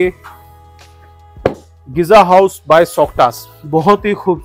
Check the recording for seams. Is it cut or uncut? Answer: uncut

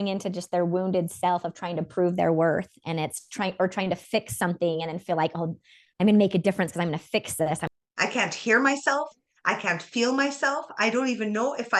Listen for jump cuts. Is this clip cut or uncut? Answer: cut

